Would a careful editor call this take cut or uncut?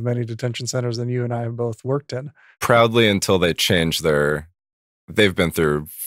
uncut